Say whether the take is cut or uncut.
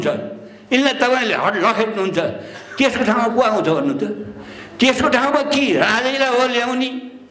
uncut